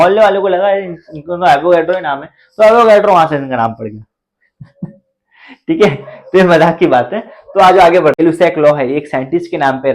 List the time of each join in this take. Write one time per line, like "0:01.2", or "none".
0:08.2